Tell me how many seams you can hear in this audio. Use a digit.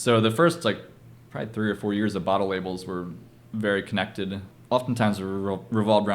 1